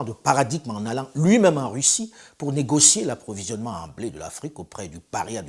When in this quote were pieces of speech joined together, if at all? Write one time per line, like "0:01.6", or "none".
none